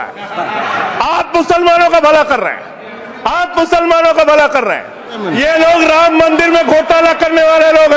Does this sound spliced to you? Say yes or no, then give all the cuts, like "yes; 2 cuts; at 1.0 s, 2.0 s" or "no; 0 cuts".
yes; 1 cut; at 5.2 s